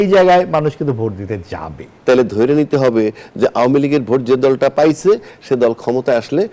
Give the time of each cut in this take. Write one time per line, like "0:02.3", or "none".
0:01.9